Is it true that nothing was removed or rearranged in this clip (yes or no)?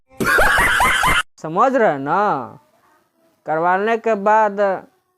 no